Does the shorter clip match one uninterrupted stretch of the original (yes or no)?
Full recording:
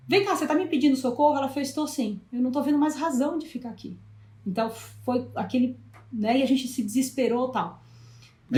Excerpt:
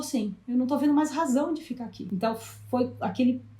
no